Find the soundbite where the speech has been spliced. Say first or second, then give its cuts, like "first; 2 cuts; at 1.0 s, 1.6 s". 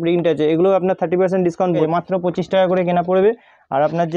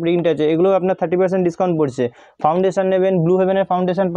first; 1 cut; at 1.8 s